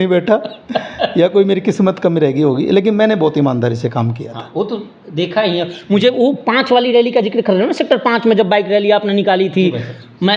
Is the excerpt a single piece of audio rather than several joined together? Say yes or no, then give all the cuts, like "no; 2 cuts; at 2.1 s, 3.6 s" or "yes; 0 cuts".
yes; 0 cuts